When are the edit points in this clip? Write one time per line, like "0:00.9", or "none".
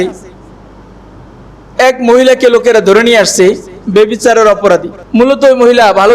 0:05.0